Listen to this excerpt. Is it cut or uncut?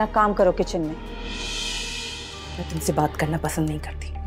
cut